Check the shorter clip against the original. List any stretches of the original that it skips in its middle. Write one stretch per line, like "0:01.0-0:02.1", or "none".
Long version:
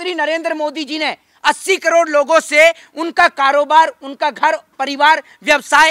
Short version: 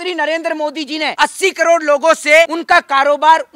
0:01.1-0:01.4
0:02.8-0:03.0